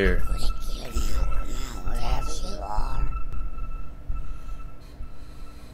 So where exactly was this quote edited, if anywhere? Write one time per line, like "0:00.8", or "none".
0:03.3